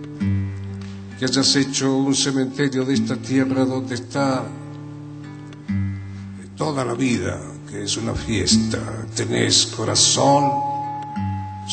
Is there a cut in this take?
yes; 1 cut; at 1.1 s

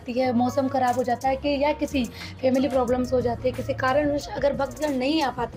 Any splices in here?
no; 0 cuts

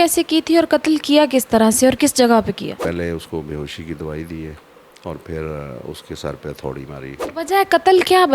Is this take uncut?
no; 2 cuts; at 2.8 s, 7.2 s

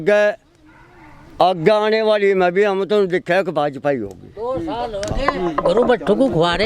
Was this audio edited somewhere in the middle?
no; 0 cuts

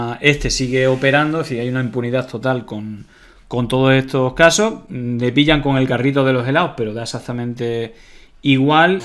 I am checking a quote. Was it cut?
no; 0 cuts

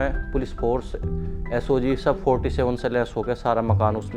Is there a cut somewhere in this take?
no; 0 cuts

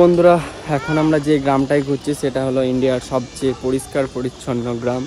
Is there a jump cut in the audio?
no; 0 cuts

